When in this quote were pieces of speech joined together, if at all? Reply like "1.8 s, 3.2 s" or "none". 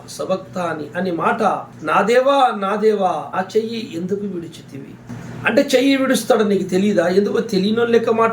1.7 s, 3.3 s, 5.1 s